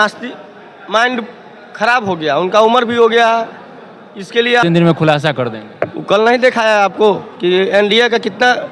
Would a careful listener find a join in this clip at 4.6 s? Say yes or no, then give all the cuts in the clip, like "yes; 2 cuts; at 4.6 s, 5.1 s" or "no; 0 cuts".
yes; 1 cut; at 4.6 s